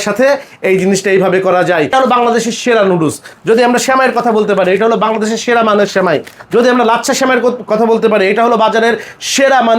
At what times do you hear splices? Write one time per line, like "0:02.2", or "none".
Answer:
0:01.9